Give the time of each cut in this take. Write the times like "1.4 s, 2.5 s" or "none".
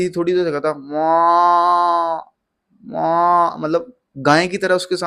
none